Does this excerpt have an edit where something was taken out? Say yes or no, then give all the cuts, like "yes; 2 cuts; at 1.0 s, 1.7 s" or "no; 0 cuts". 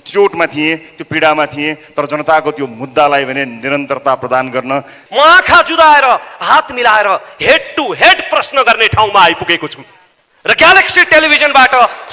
yes; 1 cut; at 5.0 s